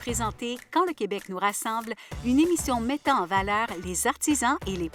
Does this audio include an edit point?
no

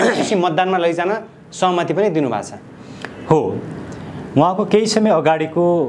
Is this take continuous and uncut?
yes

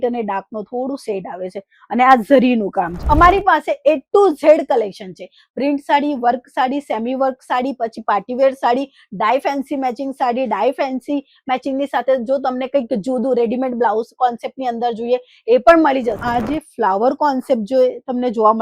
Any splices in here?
yes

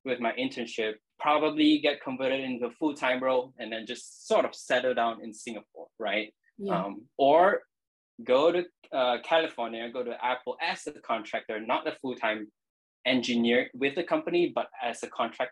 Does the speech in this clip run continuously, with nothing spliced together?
yes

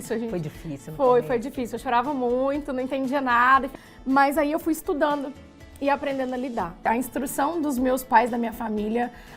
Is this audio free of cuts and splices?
no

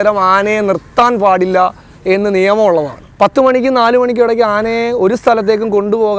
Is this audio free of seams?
no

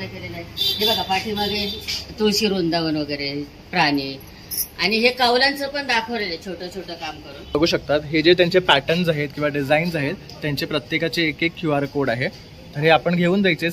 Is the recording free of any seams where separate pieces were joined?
no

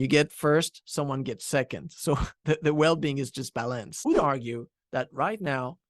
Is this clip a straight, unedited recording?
no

